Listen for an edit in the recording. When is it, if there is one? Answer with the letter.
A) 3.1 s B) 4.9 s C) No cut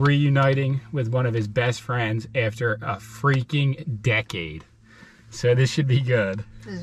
B